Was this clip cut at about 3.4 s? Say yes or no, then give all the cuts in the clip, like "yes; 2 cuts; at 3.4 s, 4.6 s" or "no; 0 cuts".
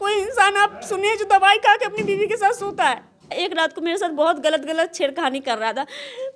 yes; 1 cut; at 3.4 s